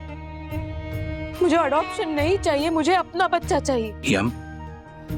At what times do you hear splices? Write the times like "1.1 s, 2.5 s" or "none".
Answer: 3.9 s